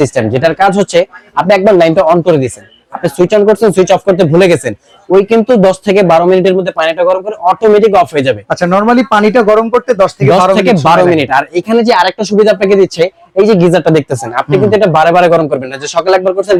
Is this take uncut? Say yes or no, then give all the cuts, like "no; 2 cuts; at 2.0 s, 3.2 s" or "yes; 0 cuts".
yes; 0 cuts